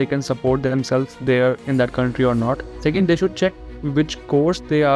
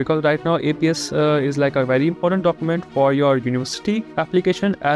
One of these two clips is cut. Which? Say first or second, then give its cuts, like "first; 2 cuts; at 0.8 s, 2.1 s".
first; 1 cut; at 2.7 s